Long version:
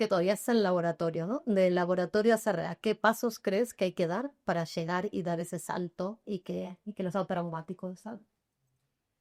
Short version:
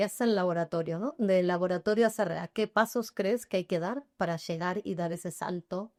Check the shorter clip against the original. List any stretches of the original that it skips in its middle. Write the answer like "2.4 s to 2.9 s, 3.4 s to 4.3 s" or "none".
none